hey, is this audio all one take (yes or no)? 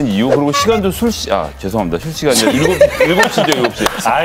yes